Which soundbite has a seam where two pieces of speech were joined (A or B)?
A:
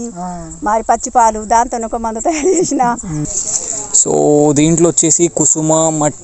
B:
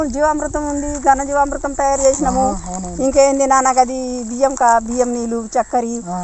A